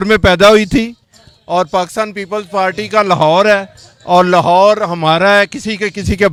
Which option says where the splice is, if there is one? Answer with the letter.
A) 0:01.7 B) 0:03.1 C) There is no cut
C